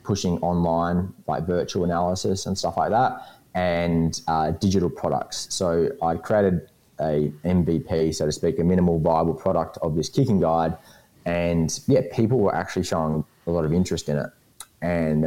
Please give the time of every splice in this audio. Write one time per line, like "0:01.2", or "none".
none